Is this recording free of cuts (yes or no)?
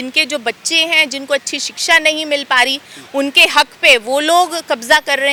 yes